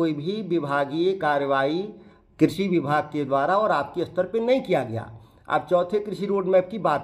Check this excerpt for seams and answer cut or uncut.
uncut